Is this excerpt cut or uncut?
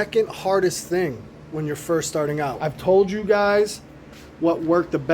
cut